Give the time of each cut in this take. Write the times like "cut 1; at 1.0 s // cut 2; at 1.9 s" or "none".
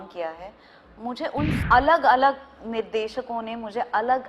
cut 1; at 1.6 s